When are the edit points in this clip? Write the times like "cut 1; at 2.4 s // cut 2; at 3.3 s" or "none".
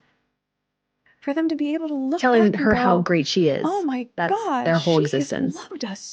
none